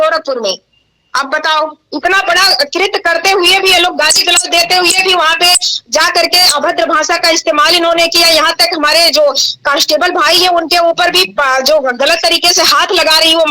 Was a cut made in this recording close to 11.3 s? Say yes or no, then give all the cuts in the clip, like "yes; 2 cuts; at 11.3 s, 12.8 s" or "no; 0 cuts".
no; 1 cut; at 1.8 s